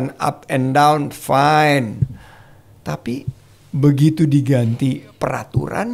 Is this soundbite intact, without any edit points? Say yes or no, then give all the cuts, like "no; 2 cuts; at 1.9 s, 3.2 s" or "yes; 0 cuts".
yes; 0 cuts